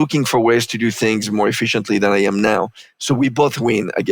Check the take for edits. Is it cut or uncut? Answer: uncut